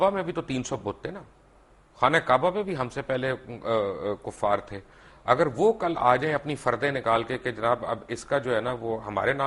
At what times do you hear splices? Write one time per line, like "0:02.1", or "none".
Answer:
none